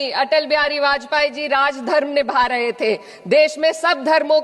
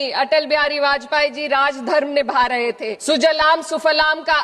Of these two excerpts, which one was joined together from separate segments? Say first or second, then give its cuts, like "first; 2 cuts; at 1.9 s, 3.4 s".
second; 1 cut; at 2.9 s